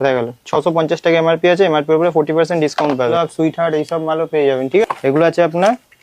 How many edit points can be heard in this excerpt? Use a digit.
2